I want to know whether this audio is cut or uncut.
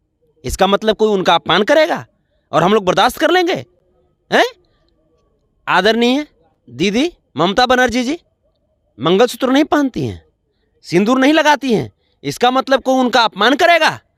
uncut